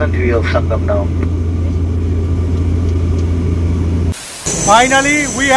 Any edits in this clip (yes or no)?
yes